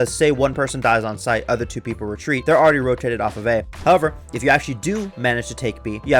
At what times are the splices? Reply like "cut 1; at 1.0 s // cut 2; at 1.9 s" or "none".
cut 1; at 2.4 s // cut 2; at 3.7 s